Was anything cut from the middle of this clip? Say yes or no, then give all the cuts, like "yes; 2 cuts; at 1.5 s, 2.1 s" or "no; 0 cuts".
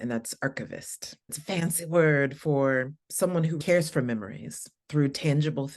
yes; 2 cuts; at 1.4 s, 3.6 s